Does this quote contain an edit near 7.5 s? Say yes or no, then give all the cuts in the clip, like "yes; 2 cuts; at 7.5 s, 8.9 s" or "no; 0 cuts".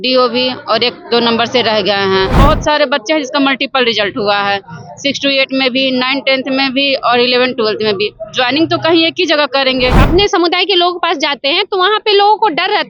no; 2 cuts; at 2.4 s, 10.0 s